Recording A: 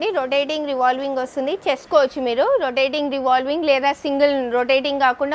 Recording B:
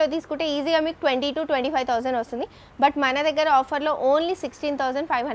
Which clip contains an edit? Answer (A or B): A